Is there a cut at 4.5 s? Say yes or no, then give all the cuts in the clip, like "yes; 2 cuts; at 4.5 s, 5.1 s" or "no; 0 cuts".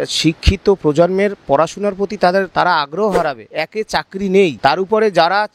yes; 2 cuts; at 3.6 s, 4.5 s